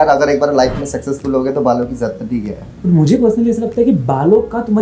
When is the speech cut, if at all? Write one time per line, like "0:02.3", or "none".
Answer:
0:02.8